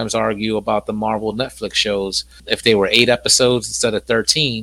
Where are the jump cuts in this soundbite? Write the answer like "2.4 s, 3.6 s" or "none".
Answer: 2.4 s